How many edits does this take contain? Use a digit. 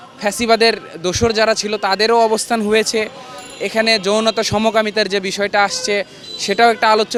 0